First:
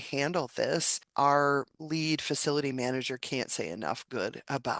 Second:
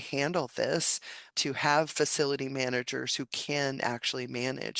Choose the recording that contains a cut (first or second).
first